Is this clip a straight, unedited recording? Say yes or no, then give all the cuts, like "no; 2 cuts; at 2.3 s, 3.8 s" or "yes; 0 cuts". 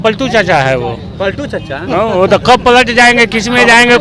yes; 0 cuts